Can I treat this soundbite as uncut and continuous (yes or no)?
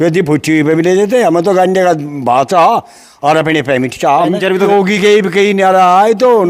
no